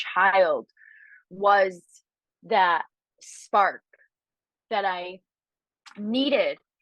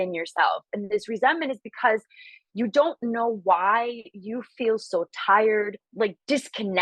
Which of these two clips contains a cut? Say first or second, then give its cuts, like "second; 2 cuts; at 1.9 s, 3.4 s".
second; 1 cut; at 5.8 s